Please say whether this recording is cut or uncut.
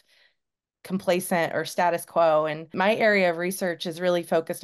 cut